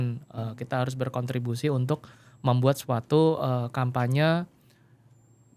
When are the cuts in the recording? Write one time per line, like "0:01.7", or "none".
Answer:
none